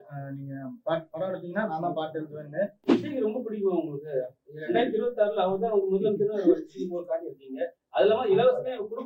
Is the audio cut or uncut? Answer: cut